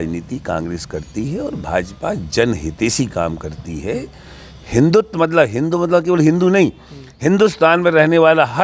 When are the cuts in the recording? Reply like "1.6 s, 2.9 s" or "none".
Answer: none

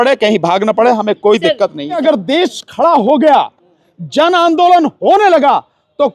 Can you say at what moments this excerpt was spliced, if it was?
2.0 s

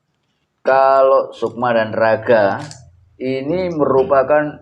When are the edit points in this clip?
1.4 s

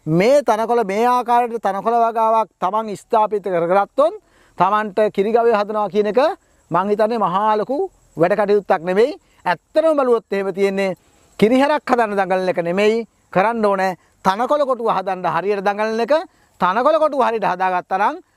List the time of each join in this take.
none

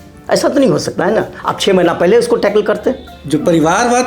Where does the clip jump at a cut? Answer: 3.1 s

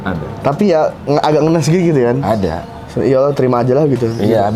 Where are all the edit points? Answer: none

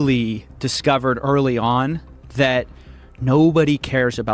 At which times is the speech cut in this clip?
none

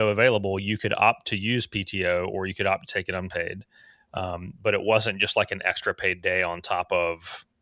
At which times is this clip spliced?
none

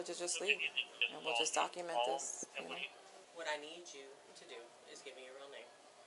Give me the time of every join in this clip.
3.2 s

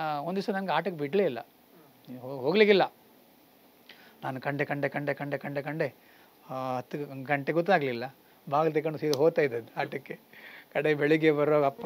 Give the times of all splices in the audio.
none

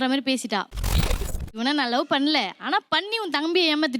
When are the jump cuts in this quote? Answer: 0.9 s

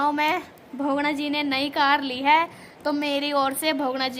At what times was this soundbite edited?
none

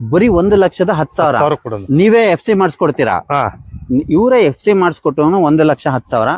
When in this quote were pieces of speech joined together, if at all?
none

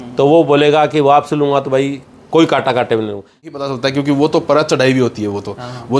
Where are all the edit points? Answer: 3.7 s

